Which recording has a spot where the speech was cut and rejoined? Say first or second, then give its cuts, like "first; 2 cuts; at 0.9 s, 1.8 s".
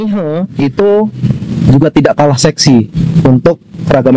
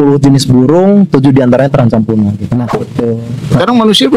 second; 1 cut; at 2.8 s